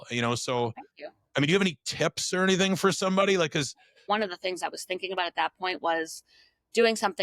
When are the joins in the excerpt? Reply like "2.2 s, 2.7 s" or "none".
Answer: 4.0 s